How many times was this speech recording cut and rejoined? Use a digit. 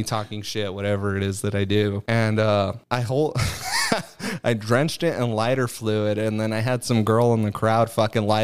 2